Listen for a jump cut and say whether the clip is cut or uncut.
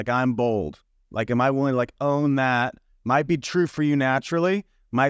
uncut